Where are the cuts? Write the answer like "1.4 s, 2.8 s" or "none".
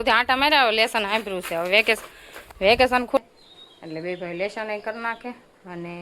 3.2 s